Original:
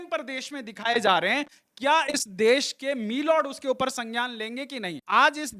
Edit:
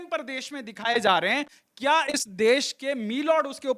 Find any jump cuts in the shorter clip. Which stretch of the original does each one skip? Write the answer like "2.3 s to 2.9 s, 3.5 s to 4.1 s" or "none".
none